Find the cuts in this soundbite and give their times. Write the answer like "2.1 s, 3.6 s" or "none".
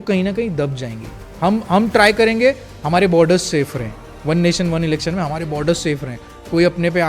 none